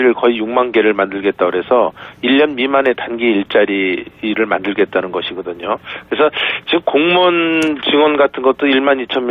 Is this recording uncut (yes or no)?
yes